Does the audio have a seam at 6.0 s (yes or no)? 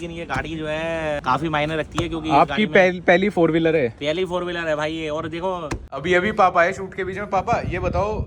yes